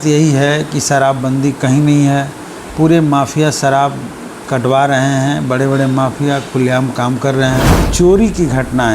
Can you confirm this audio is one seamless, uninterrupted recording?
no; 1 cut; at 7.8 s

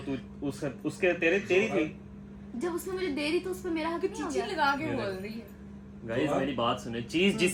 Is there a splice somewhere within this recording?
no; 0 cuts

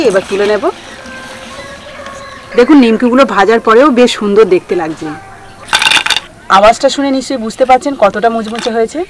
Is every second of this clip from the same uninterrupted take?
yes; 0 cuts

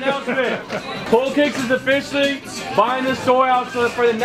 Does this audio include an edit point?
yes; 1 cut; at 1.0 s

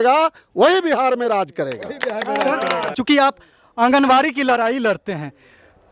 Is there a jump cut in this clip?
yes; 1 cut; at 3.0 s

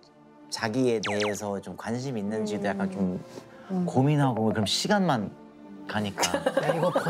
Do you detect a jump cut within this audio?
yes; 1 cut; at 3.6 s

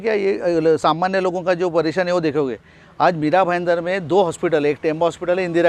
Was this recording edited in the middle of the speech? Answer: no; 0 cuts

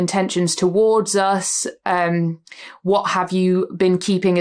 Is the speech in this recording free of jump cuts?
yes; 0 cuts

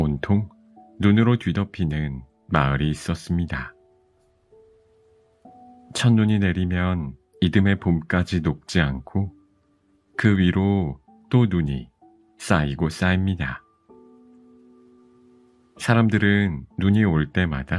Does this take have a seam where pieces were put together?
yes; 2 cuts; at 13.7 s, 15.8 s

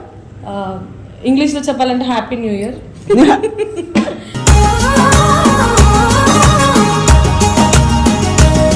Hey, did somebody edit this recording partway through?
no; 0 cuts

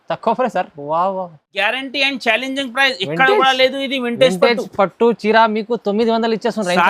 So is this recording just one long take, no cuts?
no; 1 cut; at 1.5 s

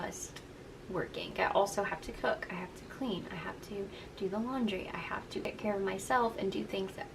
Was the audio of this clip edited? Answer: yes; 2 cuts; at 1.3 s, 5.4 s

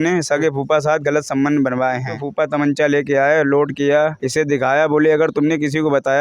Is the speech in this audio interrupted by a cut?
yes; 1 cut; at 2.1 s

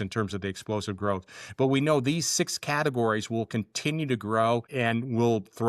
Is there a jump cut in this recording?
yes; 1 cut; at 4.7 s

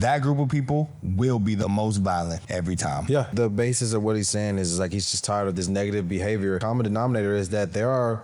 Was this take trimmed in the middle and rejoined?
yes; 3 cuts; at 1.6 s, 3.3 s, 6.6 s

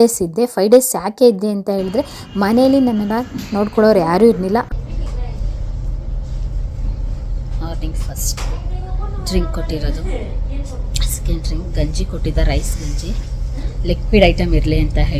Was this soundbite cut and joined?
yes; 1 cut; at 4.7 s

